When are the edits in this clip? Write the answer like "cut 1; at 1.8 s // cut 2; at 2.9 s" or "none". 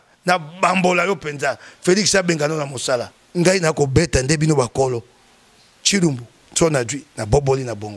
cut 1; at 3.2 s

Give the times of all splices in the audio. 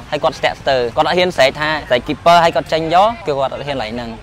cut 1; at 0.9 s // cut 2; at 1.8 s // cut 3; at 3.2 s

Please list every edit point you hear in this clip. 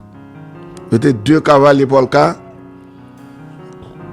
none

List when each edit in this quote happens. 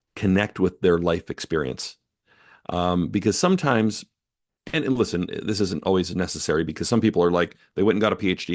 none

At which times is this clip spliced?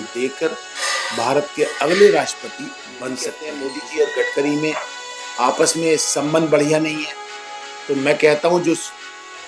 cut 1; at 3.5 s

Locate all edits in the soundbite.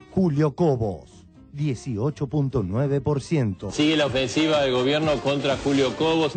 cut 1; at 3.6 s

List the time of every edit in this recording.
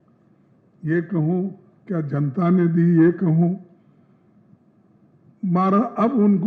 none

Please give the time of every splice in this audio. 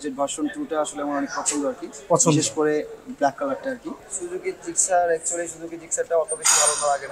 none

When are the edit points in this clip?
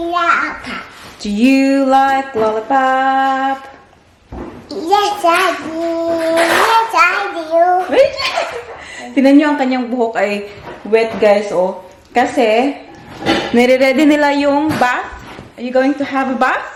none

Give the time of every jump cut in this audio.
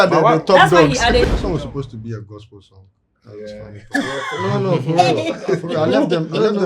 cut 1; at 1.2 s

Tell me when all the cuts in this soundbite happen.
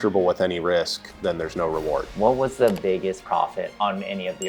cut 1; at 2.1 s // cut 2; at 3.8 s

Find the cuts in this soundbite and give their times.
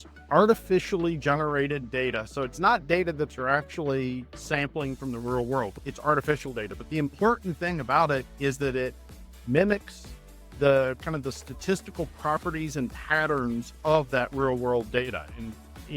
cut 1; at 5.7 s

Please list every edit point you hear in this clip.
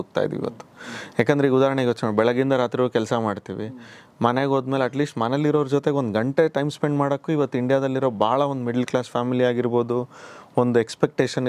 none

